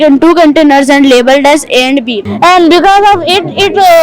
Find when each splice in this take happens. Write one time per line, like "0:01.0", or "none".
0:02.2